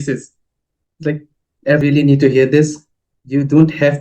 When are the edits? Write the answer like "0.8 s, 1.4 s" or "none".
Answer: 1.8 s